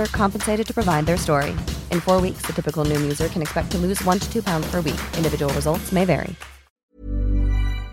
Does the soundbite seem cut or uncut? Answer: cut